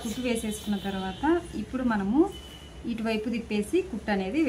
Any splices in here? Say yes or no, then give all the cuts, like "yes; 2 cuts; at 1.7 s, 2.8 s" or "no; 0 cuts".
no; 0 cuts